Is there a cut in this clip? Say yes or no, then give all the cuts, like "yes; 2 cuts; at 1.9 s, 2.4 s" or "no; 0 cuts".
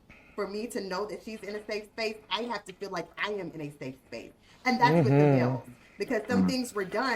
no; 0 cuts